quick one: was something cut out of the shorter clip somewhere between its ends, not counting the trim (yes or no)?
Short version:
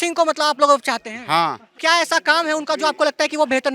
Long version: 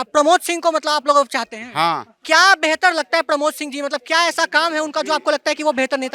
yes